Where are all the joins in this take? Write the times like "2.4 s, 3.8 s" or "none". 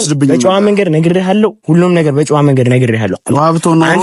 none

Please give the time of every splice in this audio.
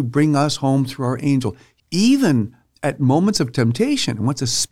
1.6 s

